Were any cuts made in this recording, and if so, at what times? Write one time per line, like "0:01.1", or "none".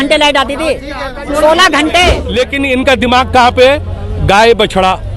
0:02.2